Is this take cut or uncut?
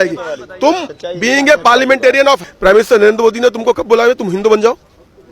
cut